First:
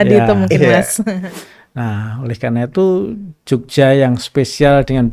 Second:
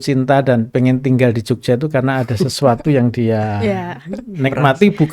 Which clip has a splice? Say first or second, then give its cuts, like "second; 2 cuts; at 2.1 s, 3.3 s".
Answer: first; 1 cut; at 1.3 s